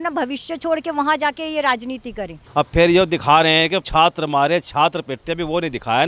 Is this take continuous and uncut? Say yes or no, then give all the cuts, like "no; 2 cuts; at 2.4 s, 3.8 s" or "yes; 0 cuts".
no; 1 cut; at 2.4 s